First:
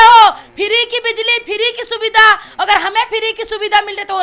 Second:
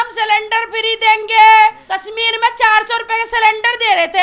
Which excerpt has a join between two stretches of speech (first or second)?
second